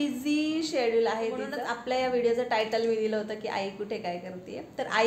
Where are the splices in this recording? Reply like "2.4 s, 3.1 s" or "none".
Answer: 1.5 s